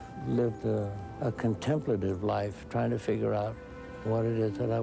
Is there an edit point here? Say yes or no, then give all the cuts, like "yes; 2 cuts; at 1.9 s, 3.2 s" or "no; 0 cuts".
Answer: yes; 1 cut; at 1.0 s